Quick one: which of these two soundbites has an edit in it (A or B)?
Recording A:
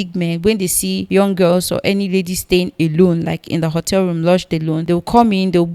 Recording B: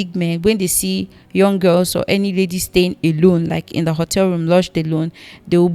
A